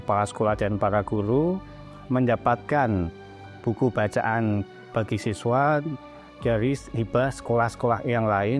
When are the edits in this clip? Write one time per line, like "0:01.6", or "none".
0:04.8